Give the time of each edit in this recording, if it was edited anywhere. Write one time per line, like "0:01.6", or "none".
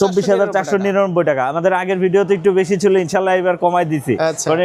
none